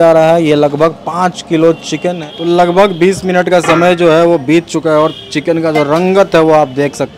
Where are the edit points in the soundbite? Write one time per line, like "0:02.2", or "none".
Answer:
0:02.2

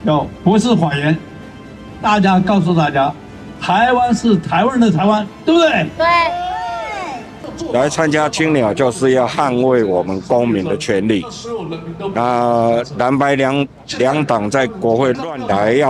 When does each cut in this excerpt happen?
none

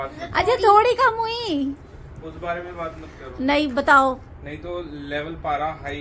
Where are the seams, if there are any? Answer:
none

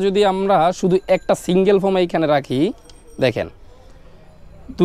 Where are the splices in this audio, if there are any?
none

